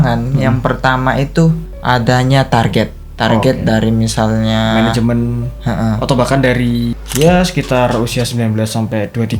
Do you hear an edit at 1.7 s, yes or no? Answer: yes